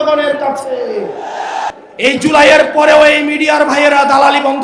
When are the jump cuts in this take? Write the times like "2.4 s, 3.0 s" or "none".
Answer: 1.7 s